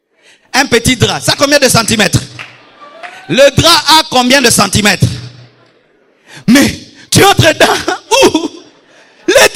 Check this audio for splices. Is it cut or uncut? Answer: uncut